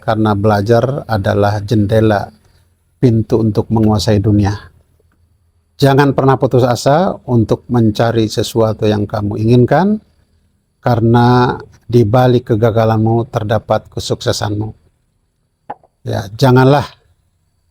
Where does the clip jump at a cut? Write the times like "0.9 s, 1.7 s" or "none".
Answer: none